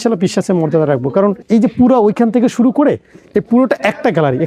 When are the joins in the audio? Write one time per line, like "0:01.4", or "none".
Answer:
0:01.4